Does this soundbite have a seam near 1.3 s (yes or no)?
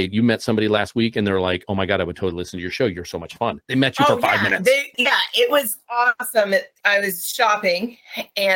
no